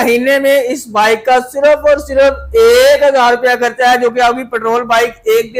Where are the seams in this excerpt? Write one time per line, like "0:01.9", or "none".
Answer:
none